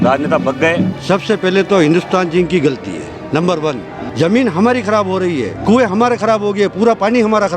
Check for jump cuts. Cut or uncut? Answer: cut